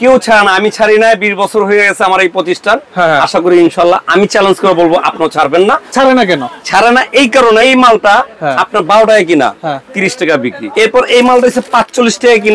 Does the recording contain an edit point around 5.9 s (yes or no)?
yes